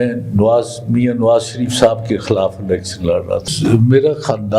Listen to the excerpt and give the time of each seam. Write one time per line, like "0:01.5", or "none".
0:03.5